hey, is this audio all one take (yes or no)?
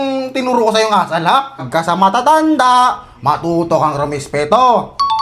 no